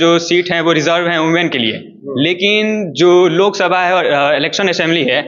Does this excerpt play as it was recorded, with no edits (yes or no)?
yes